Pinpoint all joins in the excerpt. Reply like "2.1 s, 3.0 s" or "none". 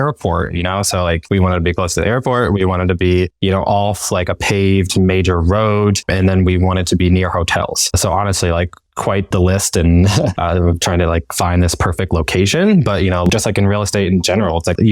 1.2 s, 13.3 s